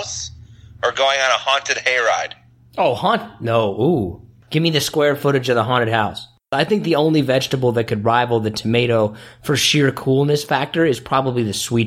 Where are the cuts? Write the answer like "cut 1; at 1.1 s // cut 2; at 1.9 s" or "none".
cut 1; at 4.4 s // cut 2; at 6.5 s